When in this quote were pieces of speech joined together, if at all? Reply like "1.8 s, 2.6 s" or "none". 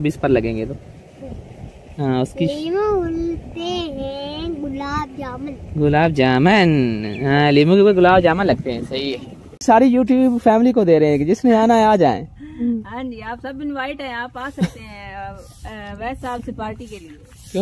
9.6 s